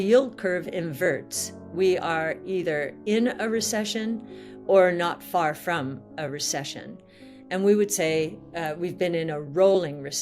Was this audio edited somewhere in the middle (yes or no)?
no